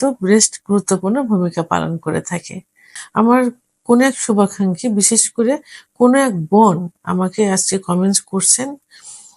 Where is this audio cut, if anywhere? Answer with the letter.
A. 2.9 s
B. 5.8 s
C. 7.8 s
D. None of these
A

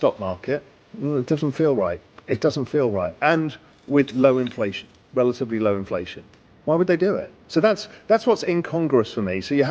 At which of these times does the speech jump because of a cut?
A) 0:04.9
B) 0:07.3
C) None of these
B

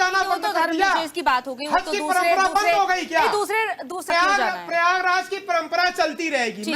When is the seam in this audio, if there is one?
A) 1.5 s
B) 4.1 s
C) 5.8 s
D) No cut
B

